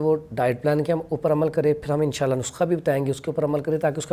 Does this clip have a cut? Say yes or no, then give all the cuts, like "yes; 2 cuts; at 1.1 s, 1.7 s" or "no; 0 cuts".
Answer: no; 0 cuts